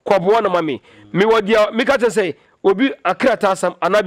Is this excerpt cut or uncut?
uncut